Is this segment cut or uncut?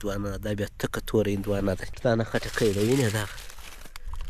cut